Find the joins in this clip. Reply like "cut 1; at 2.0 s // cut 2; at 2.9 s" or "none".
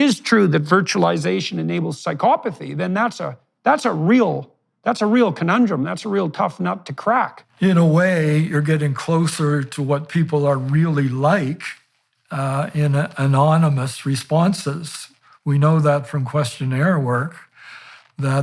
cut 1; at 7.4 s